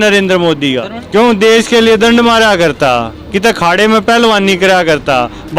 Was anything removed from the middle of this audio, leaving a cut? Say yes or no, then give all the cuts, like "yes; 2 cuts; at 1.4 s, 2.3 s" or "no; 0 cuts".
yes; 1 cut; at 0.9 s